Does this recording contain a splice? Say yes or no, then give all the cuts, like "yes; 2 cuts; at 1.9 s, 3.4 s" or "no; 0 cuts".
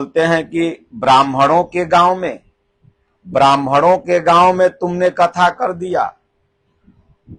no; 0 cuts